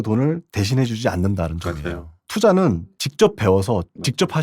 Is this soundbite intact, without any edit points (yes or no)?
no